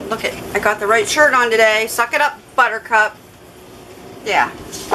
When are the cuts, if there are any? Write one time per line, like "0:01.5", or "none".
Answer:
none

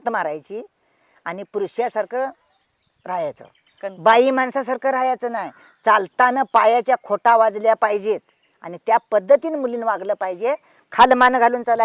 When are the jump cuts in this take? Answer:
none

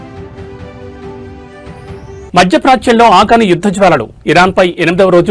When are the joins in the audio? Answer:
0:02.2

